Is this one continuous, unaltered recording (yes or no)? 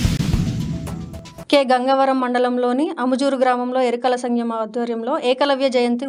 yes